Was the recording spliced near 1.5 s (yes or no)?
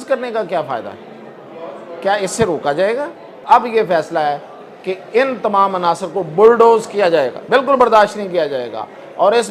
no